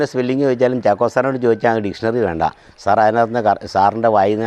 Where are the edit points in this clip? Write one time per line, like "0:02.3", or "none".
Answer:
none